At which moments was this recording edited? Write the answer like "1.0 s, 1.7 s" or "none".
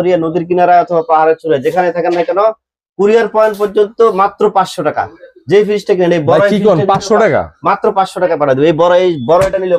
none